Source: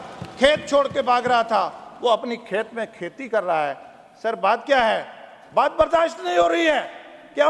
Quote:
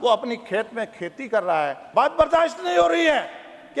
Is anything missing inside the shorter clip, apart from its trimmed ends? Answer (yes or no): yes